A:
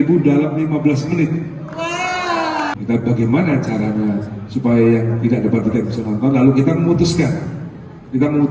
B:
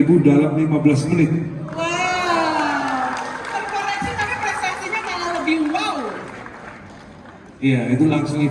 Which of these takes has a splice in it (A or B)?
A